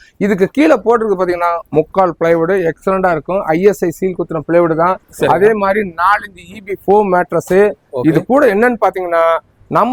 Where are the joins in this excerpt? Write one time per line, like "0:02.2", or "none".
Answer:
none